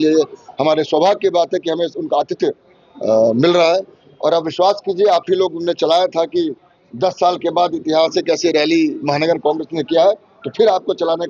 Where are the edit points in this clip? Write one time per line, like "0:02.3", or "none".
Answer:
none